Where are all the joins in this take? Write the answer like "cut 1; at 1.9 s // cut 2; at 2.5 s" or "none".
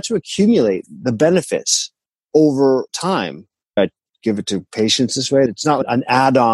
cut 1; at 3.8 s // cut 2; at 5.5 s

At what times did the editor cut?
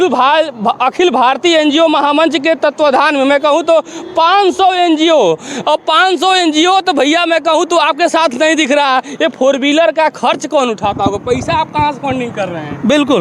none

